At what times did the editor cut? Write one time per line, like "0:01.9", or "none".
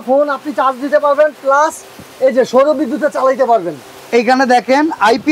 none